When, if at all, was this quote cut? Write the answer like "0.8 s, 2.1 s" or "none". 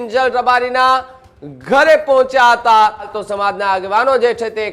3.2 s